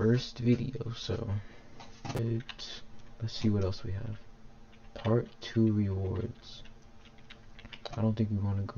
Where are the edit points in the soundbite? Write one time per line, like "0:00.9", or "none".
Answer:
0:02.2